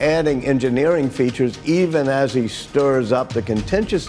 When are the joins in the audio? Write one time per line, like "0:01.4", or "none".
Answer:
none